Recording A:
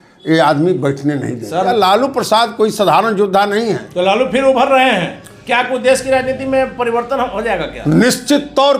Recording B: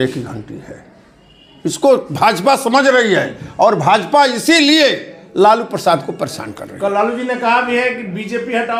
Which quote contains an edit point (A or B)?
A